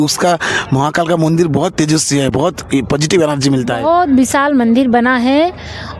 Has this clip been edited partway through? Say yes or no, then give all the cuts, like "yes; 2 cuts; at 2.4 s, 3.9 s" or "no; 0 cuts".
no; 0 cuts